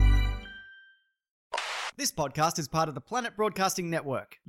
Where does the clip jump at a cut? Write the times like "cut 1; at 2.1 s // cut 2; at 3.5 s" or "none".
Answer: cut 1; at 1.5 s